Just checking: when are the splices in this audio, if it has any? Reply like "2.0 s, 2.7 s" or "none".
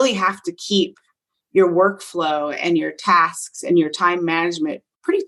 none